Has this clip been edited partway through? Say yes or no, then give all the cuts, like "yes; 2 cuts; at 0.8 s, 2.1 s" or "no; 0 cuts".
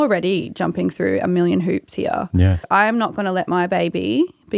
yes; 1 cut; at 2.6 s